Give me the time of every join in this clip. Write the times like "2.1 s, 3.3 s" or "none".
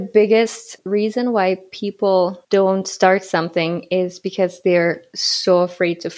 none